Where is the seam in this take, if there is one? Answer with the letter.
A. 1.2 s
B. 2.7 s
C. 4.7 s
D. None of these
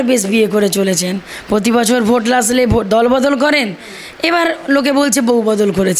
D